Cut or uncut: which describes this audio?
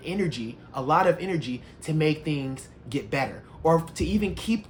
uncut